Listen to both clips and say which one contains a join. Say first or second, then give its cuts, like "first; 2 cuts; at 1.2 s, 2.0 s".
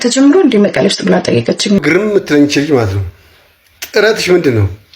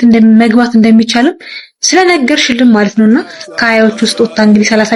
first; 1 cut; at 1.8 s